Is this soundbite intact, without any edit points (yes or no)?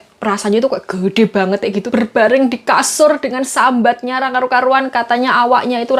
no